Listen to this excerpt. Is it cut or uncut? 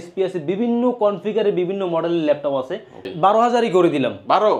cut